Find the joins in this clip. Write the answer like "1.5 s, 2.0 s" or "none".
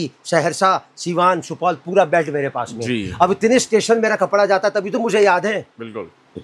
none

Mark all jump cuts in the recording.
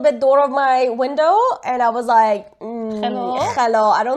none

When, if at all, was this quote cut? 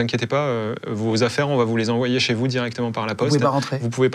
none

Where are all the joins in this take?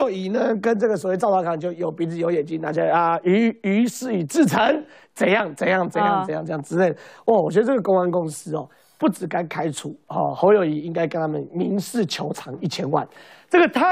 none

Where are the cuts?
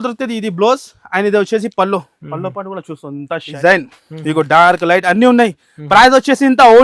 3.5 s

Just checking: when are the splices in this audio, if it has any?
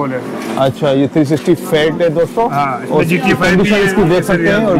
none

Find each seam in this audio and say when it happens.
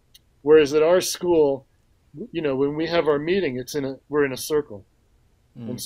2.0 s

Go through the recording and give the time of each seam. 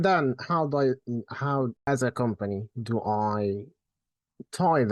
1.8 s

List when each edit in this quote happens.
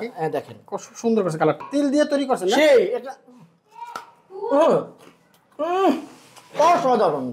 1.6 s

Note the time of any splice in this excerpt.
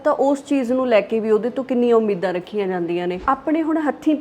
3.2 s

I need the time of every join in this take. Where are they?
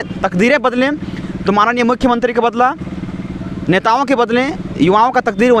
none

